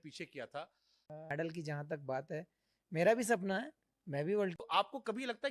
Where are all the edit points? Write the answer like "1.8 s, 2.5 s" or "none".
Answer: 1.1 s, 4.6 s